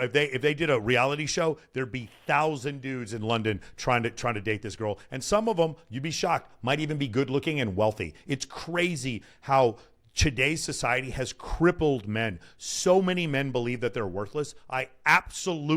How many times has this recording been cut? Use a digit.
0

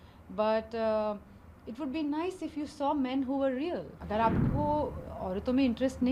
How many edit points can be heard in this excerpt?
1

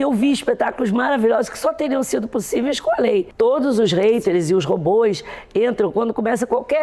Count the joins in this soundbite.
1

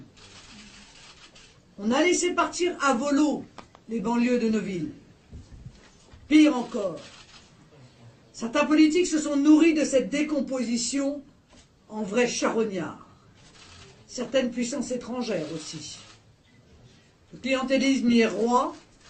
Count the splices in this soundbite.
1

